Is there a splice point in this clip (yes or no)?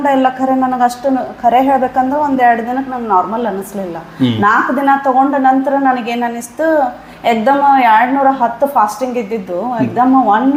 no